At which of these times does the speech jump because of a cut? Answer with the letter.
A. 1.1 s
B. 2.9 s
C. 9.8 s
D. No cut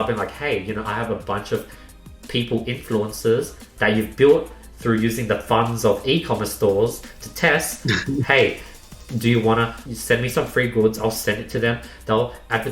C